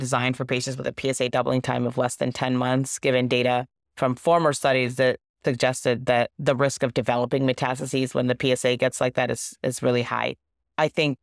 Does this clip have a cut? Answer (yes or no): yes